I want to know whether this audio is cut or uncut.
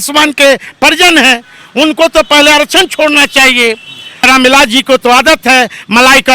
cut